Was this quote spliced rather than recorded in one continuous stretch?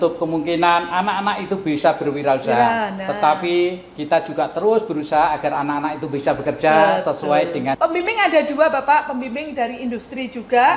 yes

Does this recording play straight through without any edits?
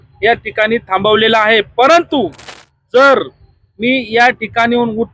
yes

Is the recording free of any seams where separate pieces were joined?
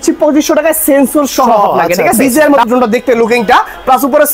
no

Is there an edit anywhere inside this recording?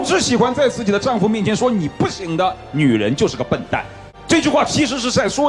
no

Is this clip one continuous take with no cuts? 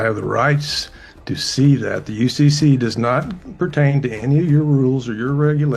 yes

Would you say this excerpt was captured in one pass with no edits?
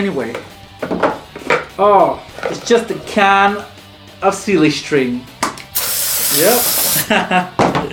yes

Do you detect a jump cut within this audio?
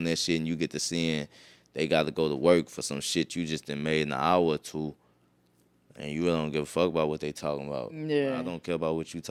no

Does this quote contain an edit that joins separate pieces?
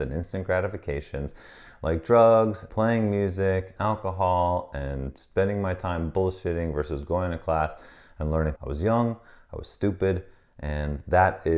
yes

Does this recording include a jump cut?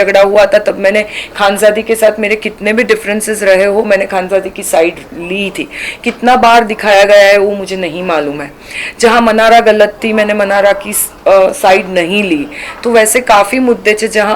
no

